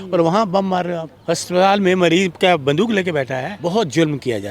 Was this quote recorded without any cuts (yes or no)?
no